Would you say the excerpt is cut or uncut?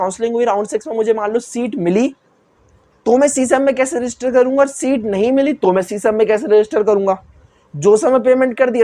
uncut